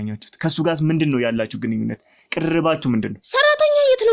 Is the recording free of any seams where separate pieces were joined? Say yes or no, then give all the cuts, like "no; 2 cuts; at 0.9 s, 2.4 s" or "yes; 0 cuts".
yes; 0 cuts